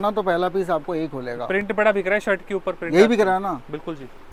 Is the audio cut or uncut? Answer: uncut